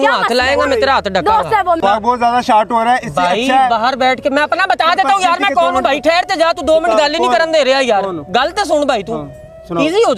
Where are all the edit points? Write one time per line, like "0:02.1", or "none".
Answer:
0:01.8